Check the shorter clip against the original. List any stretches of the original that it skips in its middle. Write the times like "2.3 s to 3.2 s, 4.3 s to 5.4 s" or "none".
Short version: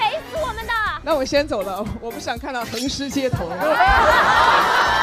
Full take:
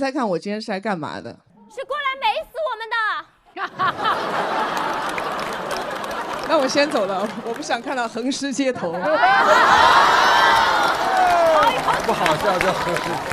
3.2 s to 6.4 s